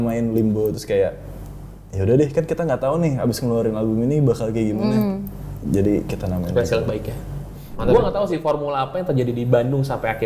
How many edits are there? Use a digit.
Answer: 1